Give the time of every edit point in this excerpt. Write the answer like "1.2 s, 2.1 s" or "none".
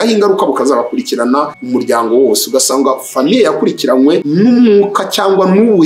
1.6 s, 4.3 s